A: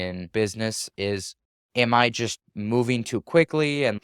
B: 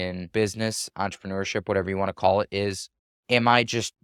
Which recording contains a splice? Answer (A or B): A